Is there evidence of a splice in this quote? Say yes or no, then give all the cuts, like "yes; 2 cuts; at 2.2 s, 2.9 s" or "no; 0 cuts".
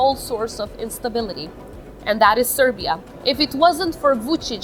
yes; 1 cut; at 3.1 s